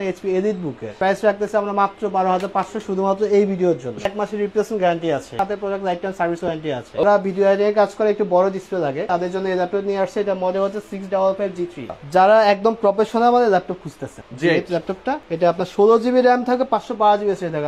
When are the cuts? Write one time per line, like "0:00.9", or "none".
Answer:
0:01.0
0:04.1
0:05.3
0:07.0
0:09.1
0:11.9
0:14.1
0:15.3